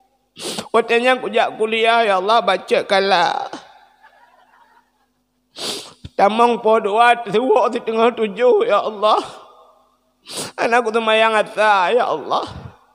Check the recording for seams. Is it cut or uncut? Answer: uncut